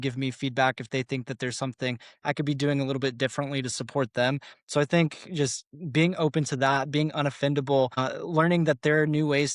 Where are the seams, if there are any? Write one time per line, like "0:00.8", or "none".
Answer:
none